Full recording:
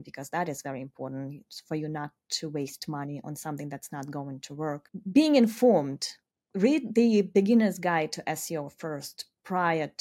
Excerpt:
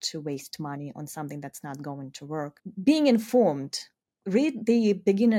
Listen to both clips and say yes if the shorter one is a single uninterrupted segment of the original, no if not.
yes